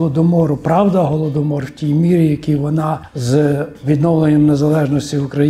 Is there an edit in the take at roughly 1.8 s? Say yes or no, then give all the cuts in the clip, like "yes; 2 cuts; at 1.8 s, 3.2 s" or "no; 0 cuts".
no; 1 cut; at 3.1 s